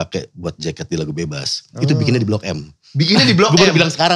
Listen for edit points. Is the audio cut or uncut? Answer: uncut